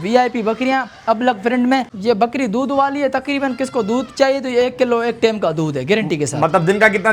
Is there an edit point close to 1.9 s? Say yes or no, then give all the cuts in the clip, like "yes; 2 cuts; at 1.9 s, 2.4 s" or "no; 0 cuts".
yes; 1 cut; at 1.9 s